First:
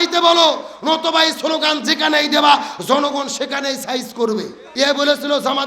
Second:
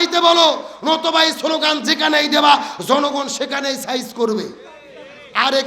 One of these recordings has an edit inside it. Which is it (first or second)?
first